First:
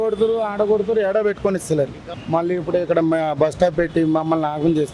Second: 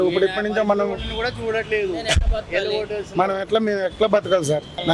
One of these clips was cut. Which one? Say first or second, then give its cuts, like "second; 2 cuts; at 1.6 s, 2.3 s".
first; 1 cut; at 2.1 s